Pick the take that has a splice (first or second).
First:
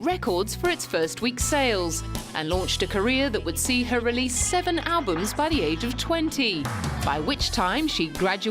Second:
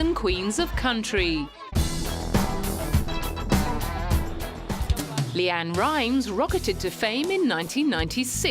second